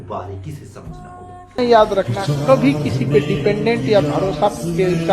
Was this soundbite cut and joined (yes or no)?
yes